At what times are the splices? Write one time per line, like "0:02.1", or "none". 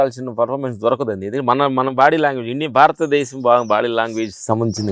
none